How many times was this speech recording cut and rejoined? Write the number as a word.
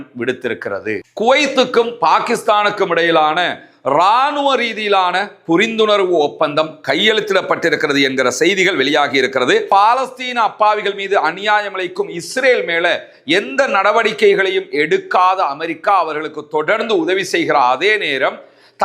two